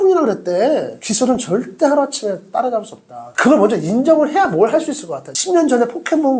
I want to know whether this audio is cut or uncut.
cut